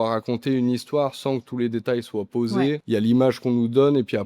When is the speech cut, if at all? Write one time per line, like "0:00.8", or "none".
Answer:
0:02.8